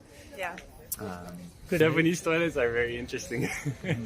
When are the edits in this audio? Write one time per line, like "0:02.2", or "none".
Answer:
0:01.8